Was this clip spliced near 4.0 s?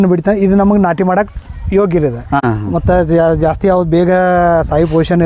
no; 1 cut; at 2.4 s

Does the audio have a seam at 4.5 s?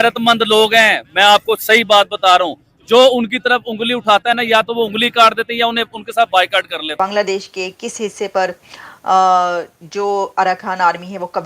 no; 1 cut; at 6.9 s

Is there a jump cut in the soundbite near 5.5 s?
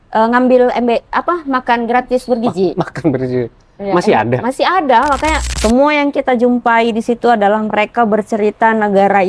yes; 1 cut; at 5.5 s

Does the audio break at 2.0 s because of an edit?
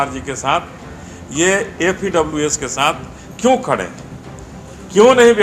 yes; 1 cut; at 2.0 s

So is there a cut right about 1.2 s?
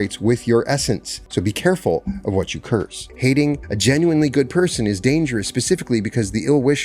yes; 3 cuts; at 1.2 s, 3.0 s, 3.7 s

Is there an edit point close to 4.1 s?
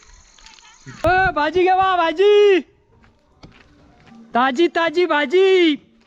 yes; 2 cuts; at 1.0 s, 4.1 s

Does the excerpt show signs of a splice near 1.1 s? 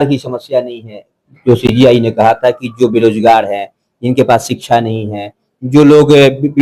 no; 0 cuts

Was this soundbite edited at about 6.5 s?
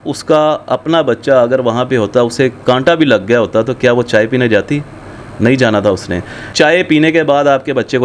yes; 1 cut; at 6.5 s

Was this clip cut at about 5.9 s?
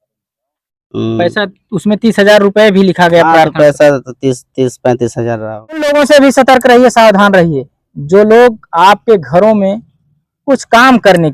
yes; 1 cut; at 5.9 s

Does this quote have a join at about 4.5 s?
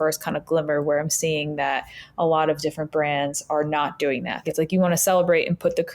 yes; 1 cut; at 4.5 s

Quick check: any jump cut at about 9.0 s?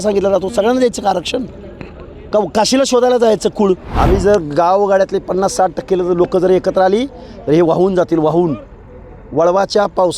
no; 1 cut; at 3.9 s

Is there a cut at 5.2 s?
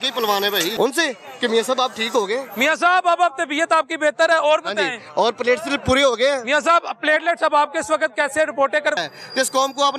no; 2 cuts; at 0.7 s, 8.9 s

